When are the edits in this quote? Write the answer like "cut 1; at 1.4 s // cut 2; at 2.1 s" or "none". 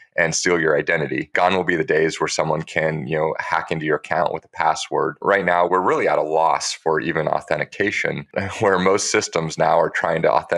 cut 1; at 1.2 s // cut 2; at 5.2 s // cut 3; at 8.3 s